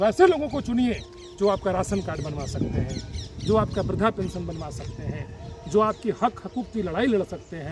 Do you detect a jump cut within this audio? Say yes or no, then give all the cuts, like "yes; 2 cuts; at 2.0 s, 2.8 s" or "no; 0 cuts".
no; 0 cuts